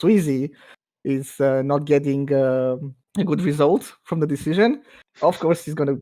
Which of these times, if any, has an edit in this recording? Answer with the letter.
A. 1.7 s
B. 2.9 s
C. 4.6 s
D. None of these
B